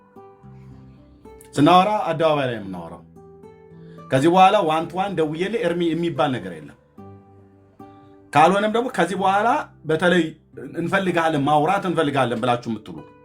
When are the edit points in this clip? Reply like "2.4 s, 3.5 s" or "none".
6.9 s, 8.3 s